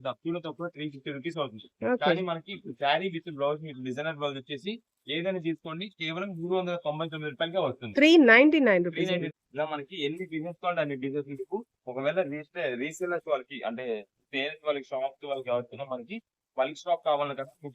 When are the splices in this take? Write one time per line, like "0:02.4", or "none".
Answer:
0:09.3